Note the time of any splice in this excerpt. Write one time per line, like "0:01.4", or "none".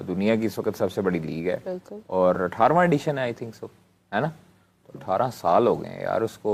none

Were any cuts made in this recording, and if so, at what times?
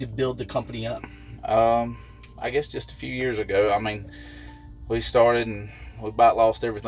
none

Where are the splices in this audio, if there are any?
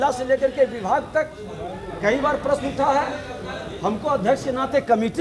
none

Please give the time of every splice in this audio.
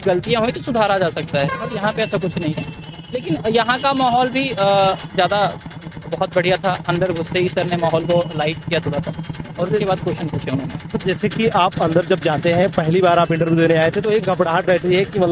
none

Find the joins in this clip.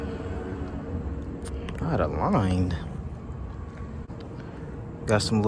0:04.1

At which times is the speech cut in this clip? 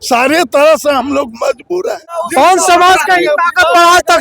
0:02.2

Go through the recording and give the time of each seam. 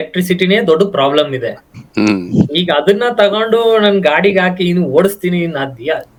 none

